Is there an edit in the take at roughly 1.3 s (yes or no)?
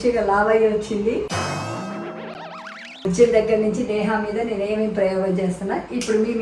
yes